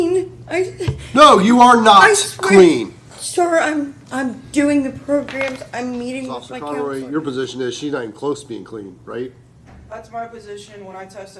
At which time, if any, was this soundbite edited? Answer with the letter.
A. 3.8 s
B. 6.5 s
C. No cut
B